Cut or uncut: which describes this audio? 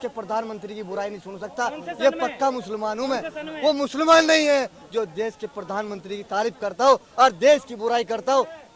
uncut